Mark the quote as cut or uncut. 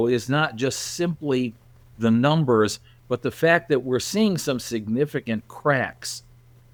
uncut